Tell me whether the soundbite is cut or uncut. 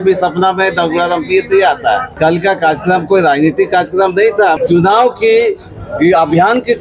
cut